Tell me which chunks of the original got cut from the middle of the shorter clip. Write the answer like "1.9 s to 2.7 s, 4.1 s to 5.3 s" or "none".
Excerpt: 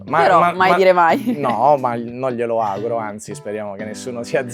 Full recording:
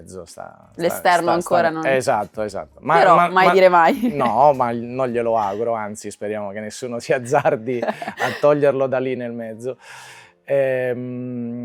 none